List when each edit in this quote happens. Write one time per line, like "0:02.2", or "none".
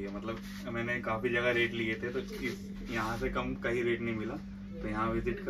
none

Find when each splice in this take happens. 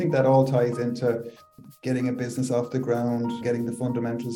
0:01.5
0:03.4

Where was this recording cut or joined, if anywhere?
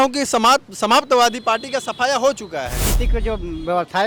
0:03.0

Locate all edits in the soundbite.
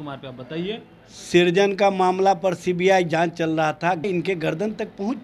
0:04.0

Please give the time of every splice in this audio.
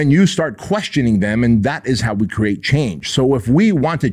none

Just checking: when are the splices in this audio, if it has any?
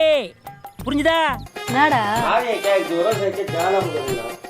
0:01.5

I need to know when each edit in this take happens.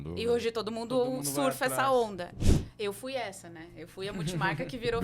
0:02.4

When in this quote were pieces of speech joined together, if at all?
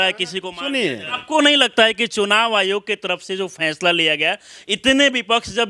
0:01.2

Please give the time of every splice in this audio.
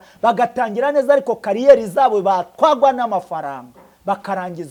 none

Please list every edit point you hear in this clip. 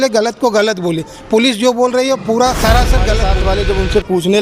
0:03.2

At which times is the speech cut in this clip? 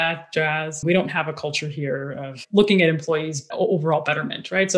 0:00.8
0:03.5

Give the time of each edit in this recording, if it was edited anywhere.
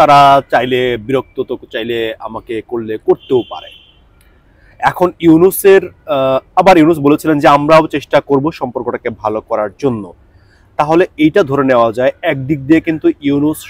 none

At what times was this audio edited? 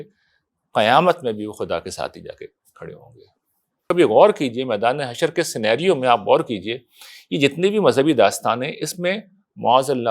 0:03.8

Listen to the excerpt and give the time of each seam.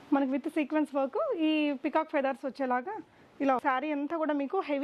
0:03.6

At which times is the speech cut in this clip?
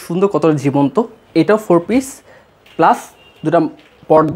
none

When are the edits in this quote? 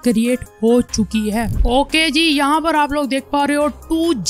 0:01.6

